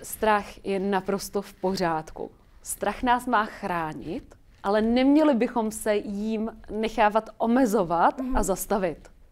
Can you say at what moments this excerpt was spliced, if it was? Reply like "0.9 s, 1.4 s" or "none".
none